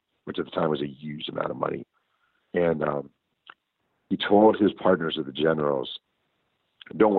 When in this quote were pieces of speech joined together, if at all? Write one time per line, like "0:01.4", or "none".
none